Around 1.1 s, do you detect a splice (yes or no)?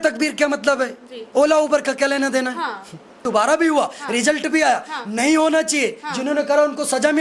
no